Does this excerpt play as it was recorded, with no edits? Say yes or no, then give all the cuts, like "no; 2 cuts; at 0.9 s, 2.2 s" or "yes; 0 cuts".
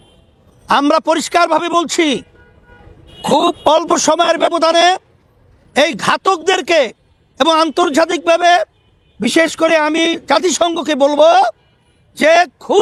yes; 0 cuts